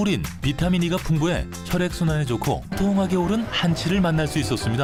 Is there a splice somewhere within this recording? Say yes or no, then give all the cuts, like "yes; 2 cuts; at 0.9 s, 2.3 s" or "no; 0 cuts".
no; 0 cuts